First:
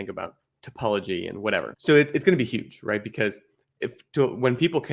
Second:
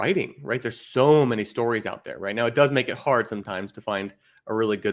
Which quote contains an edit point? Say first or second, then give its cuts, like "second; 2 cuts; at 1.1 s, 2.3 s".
first; 1 cut; at 1.7 s